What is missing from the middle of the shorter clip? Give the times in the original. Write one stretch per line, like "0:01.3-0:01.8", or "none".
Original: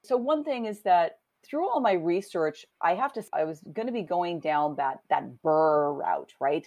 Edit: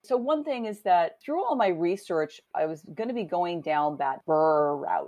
0:01.2-0:01.4
0:02.7-0:03.2
0:05.0-0:05.4